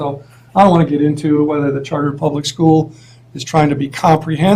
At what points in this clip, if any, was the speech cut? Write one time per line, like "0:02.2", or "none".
0:01.4